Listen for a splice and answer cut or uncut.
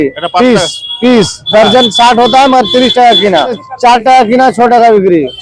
cut